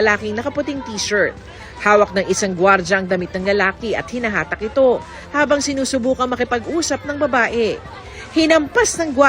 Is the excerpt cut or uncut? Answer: cut